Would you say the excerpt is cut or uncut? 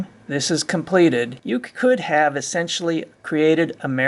cut